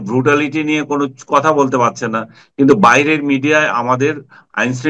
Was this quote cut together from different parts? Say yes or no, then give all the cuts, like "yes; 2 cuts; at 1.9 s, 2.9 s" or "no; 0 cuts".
no; 0 cuts